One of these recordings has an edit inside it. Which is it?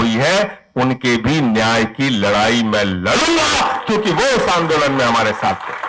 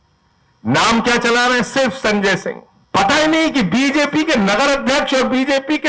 second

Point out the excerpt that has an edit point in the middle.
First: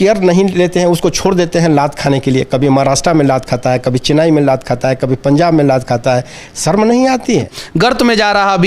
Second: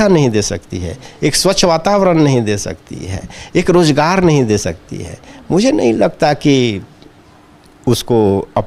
first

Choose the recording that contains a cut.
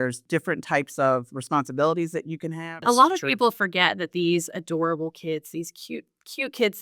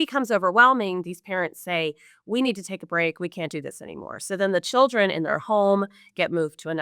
first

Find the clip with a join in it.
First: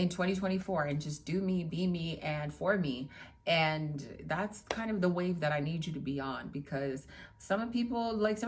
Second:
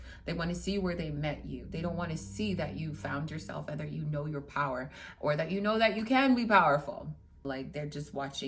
second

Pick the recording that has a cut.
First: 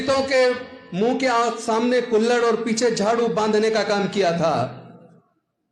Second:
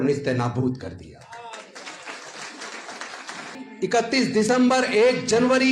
second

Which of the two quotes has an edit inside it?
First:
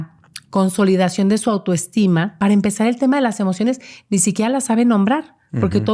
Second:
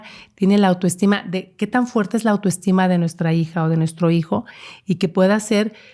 first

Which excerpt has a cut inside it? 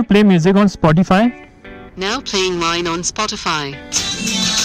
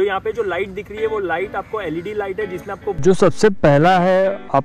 second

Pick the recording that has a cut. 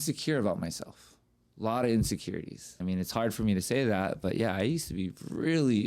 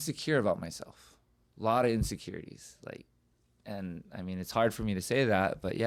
first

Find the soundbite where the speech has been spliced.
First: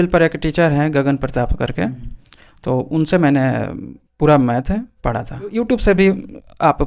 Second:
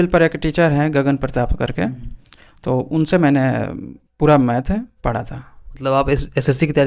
first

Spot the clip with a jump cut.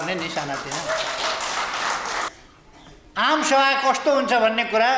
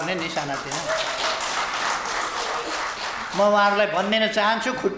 first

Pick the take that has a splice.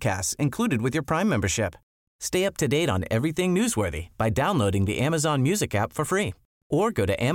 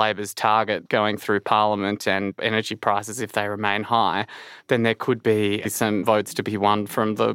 second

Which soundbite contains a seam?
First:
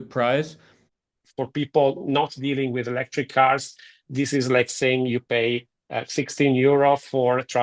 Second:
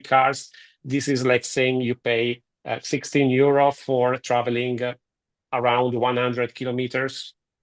first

